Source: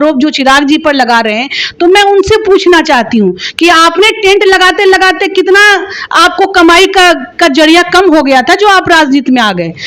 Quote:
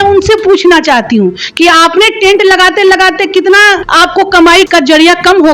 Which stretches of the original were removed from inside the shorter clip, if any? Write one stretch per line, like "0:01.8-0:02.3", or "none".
0:05.9-0:06.1
0:06.9-0:07.4